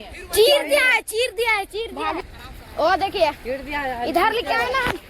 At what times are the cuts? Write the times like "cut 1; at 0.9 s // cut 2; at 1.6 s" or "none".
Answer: cut 1; at 2.2 s